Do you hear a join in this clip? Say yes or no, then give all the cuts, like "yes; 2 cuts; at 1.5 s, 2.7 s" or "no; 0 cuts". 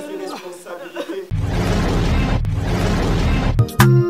yes; 1 cut; at 1.3 s